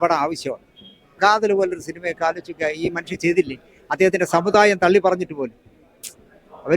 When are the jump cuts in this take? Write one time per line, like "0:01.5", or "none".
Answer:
0:01.1

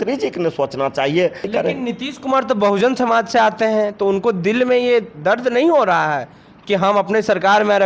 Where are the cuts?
0:01.5

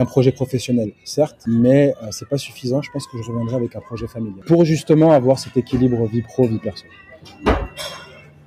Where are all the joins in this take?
0:01.4
0:04.4

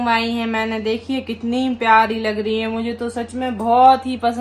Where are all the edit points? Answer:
none

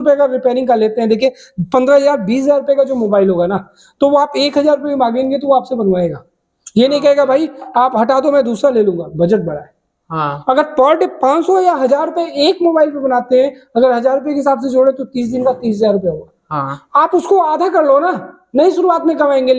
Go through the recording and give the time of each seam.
none

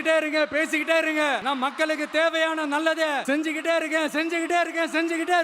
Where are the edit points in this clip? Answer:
0:01.4
0:03.2

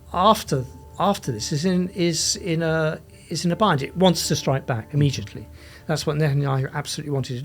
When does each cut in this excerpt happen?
none

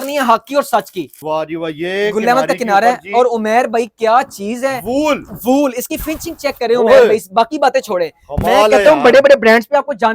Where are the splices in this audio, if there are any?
0:01.1

